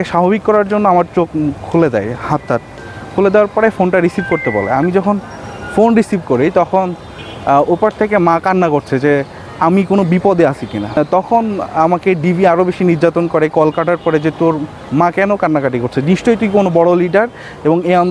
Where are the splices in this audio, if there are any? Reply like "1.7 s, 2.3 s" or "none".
11.0 s